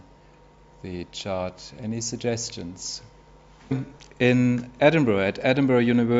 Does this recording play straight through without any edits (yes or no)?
yes